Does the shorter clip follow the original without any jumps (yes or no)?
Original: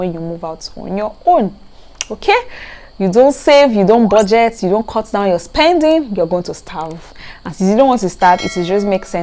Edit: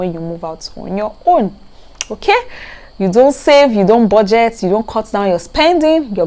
yes